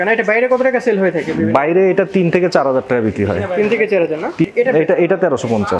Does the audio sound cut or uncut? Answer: cut